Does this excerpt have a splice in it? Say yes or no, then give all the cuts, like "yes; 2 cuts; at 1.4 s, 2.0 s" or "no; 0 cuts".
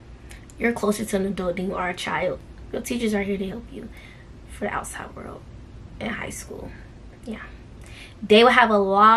no; 0 cuts